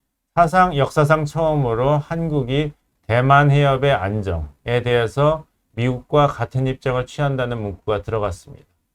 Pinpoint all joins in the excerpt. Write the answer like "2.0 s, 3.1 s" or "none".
none

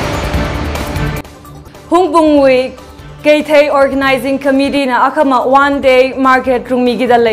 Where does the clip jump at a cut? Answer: 0.9 s

